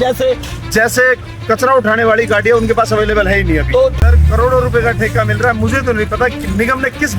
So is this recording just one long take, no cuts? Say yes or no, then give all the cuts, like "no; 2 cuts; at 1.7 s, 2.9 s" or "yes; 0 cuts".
no; 1 cut; at 4.0 s